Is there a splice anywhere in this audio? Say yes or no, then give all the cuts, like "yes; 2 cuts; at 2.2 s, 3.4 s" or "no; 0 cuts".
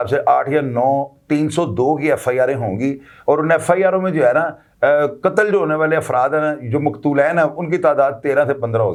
no; 0 cuts